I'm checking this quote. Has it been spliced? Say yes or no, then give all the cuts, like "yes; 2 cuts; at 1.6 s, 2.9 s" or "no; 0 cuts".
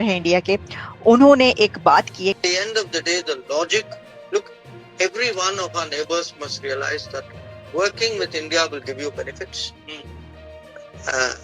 yes; 1 cut; at 2.4 s